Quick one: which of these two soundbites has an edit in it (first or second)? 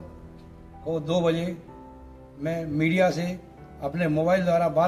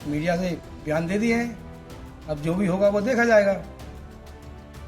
second